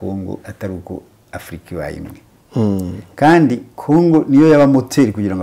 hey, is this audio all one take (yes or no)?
yes